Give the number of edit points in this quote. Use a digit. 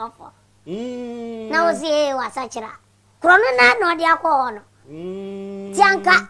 0